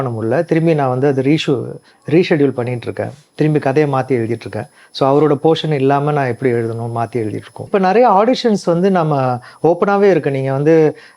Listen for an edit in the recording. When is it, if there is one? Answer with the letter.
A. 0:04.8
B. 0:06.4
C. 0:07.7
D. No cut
C